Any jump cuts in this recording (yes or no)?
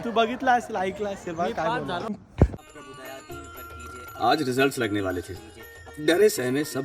yes